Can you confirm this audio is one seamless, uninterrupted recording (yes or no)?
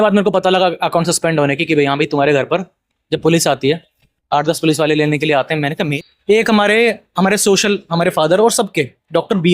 no